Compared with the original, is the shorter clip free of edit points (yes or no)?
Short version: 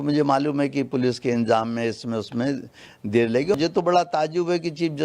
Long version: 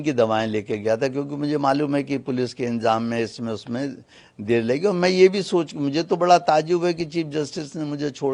no